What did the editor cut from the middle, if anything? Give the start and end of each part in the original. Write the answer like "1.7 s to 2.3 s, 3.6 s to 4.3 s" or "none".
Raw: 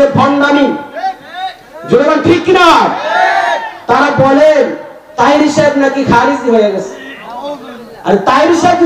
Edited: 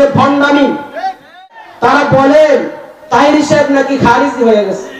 1.6 s to 3.7 s